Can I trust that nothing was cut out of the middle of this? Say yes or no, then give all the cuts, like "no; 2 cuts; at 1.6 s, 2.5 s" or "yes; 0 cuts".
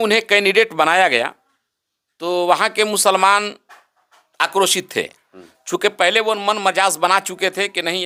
yes; 0 cuts